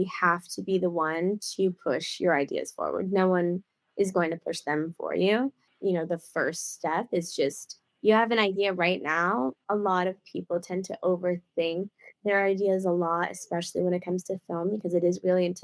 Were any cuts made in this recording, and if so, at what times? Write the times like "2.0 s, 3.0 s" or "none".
5.7 s, 9.6 s